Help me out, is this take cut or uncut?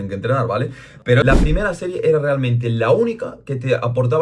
cut